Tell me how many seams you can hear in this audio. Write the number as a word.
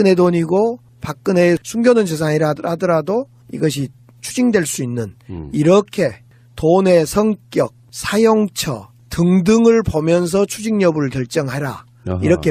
zero